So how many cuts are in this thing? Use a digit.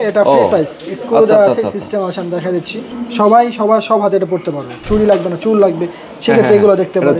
2